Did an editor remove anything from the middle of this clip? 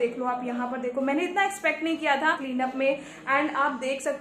no; 0 cuts

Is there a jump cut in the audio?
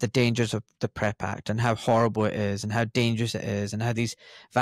no; 0 cuts

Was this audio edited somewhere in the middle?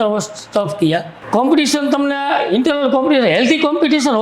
yes; 1 cut; at 1.2 s

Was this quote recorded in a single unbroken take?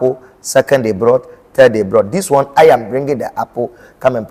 yes; 0 cuts

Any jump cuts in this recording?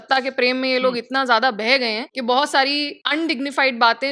yes; 2 cuts; at 2.1 s, 3.0 s

